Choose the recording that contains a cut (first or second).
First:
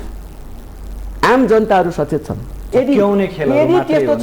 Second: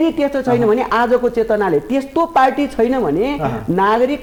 first